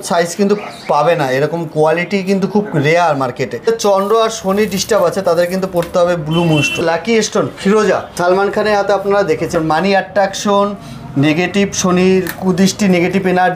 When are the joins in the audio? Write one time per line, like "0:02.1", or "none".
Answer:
0:03.7
0:06.8
0:08.1
0:09.5

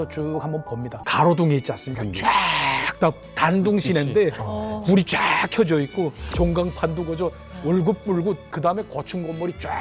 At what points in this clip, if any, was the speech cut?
0:00.9
0:08.5

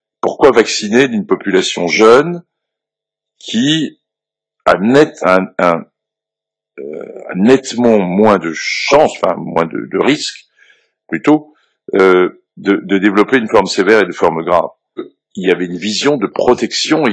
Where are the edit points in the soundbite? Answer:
0:15.1

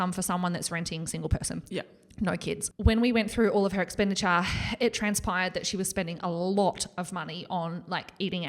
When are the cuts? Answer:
0:02.7

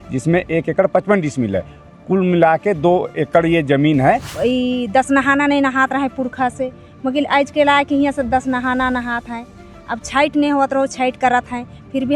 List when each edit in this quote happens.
0:04.3

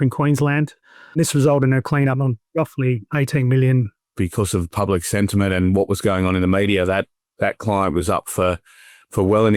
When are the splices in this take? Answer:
0:01.2
0:04.1

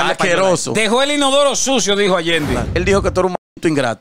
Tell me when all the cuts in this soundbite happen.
0:02.7

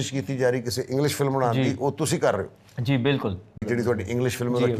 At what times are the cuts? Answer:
0:03.6

